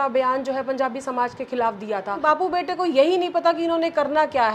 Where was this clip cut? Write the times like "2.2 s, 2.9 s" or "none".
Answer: 2.1 s